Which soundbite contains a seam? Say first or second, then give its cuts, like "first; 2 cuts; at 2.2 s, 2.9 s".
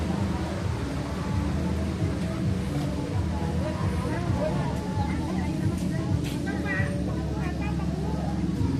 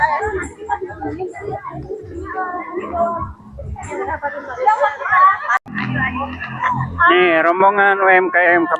second; 1 cut; at 5.7 s